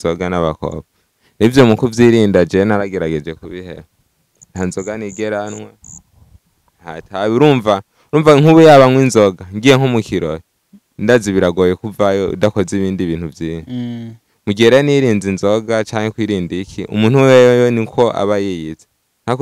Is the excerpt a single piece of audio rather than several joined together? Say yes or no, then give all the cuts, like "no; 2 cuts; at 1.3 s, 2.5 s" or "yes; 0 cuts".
yes; 0 cuts